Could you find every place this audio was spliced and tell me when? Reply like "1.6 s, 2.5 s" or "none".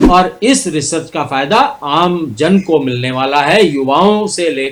none